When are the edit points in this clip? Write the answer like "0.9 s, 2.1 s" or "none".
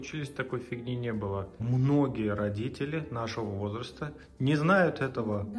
1.6 s